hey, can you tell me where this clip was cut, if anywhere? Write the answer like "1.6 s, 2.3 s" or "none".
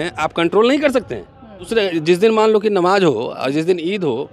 1.7 s